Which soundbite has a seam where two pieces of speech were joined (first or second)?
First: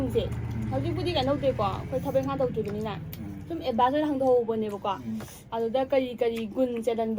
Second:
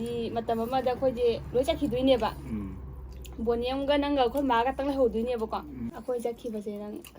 second